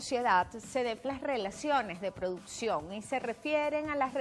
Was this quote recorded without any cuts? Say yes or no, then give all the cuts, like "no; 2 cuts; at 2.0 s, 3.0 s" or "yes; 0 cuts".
yes; 0 cuts